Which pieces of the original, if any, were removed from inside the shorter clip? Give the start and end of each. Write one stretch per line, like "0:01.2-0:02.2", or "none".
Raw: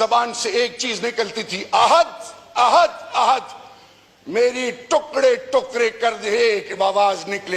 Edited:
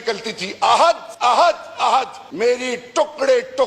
0:02.2-0:02.4
0:03.6-0:04.2